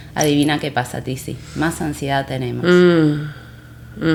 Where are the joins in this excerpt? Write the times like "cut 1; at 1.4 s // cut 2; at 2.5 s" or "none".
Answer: none